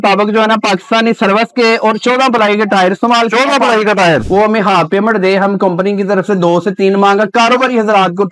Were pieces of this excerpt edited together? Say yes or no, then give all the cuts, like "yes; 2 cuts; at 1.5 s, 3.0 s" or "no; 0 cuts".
yes; 1 cut; at 4.2 s